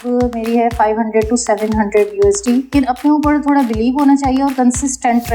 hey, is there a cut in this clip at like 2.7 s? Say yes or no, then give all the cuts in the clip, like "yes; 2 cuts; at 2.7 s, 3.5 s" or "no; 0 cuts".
yes; 1 cut; at 2.7 s